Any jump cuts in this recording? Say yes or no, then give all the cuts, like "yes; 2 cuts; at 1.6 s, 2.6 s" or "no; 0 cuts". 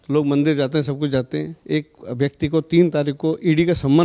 no; 0 cuts